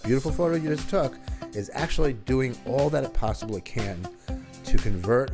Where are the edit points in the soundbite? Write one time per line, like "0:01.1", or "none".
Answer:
none